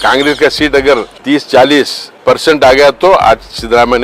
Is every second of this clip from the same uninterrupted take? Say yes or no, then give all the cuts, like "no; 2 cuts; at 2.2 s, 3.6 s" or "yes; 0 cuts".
no; 2 cuts; at 1.1 s, 2.0 s